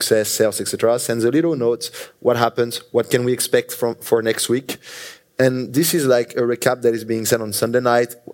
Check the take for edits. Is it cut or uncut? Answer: uncut